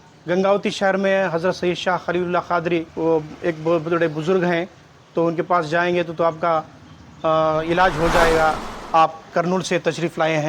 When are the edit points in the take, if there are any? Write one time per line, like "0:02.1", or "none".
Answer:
0:02.9
0:08.7